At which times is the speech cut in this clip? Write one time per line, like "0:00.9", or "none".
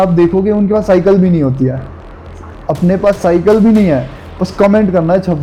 none